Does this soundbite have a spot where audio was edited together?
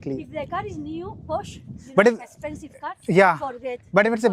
no; 0 cuts

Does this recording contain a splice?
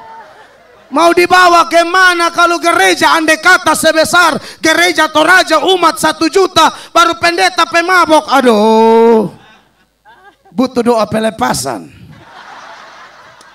no; 0 cuts

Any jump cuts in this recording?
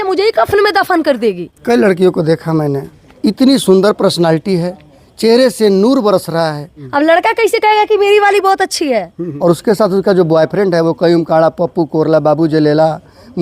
yes; 3 cuts; at 1.5 s, 6.7 s, 9.2 s

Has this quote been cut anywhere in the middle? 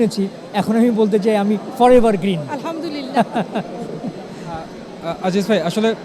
no; 0 cuts

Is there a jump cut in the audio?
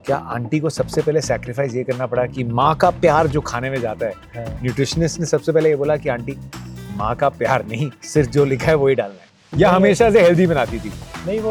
no; 0 cuts

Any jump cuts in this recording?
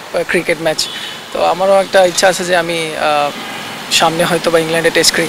no; 0 cuts

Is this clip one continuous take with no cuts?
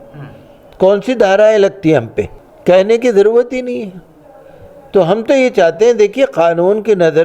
yes; 0 cuts

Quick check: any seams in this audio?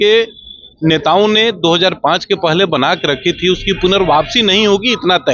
no; 0 cuts

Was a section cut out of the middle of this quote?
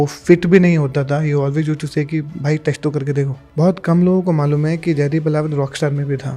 yes; 1 cut; at 3.4 s

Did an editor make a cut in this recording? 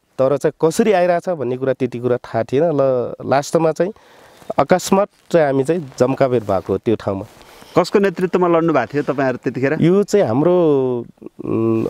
no; 0 cuts

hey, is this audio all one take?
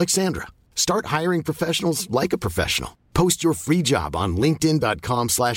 yes; 0 cuts

